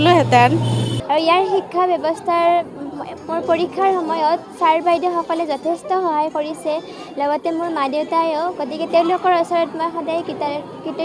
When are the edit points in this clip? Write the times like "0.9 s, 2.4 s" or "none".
0.9 s

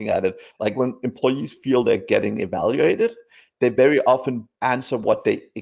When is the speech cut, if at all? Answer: 4.5 s

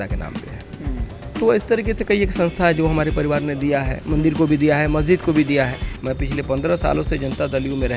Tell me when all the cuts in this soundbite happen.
5.9 s

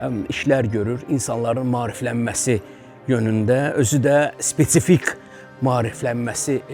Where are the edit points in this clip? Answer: none

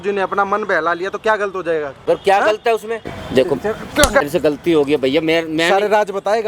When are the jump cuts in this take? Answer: 1.9 s, 3.1 s, 4.2 s

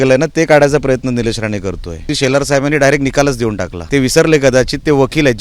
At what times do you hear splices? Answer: 2.1 s, 3.7 s

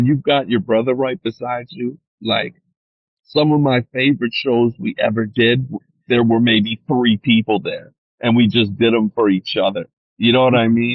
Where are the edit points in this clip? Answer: none

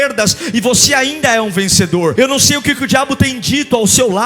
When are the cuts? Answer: 2.1 s

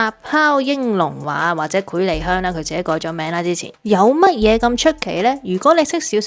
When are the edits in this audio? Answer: 3.7 s

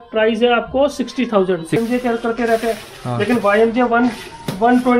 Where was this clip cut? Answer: 1.8 s

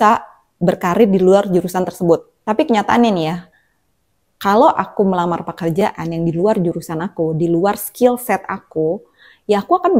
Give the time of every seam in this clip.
2.3 s

